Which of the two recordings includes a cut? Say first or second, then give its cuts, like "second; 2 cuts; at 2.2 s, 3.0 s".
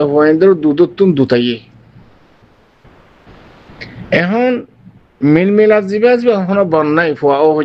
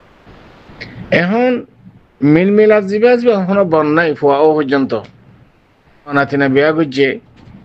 second; 1 cut; at 6.1 s